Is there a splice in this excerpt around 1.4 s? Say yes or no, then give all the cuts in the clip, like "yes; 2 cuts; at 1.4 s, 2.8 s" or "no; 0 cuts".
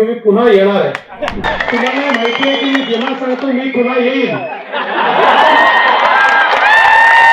yes; 1 cut; at 1.4 s